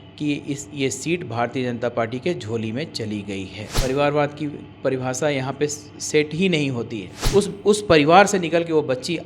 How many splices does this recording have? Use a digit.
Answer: 2